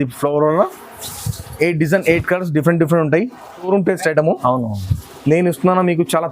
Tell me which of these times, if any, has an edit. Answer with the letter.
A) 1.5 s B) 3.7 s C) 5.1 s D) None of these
B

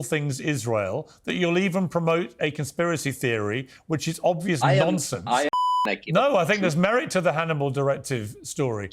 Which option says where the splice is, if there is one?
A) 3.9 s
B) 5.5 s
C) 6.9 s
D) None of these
B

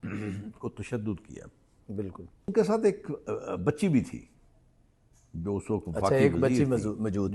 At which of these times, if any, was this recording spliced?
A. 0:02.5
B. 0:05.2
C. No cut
A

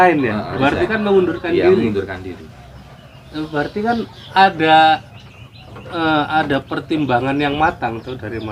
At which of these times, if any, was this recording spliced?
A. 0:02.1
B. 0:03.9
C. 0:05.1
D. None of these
D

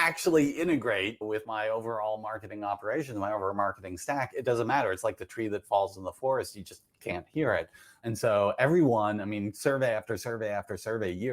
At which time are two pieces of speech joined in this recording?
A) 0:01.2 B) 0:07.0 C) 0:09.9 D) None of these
A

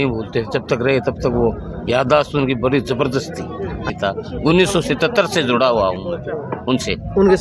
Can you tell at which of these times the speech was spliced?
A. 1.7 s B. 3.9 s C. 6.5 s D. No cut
B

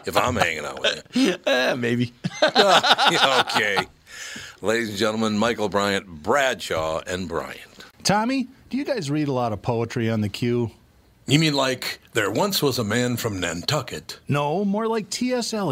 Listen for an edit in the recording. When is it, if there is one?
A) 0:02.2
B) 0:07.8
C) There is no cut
B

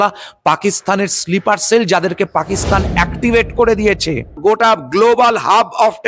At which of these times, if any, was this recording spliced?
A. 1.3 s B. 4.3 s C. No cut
B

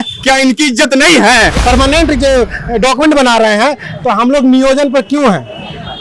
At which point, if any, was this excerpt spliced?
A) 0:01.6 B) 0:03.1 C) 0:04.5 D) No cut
A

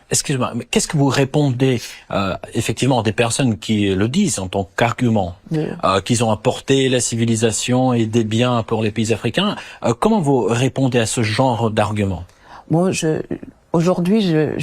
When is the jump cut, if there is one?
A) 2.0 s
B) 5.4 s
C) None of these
B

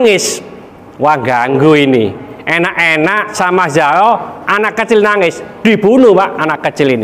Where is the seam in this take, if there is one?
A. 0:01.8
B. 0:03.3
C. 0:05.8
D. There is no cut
B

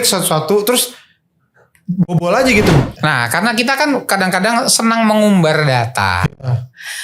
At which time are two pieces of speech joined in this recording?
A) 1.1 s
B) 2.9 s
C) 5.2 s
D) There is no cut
B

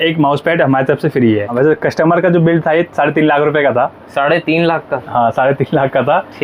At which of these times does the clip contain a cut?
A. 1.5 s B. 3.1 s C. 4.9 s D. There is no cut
A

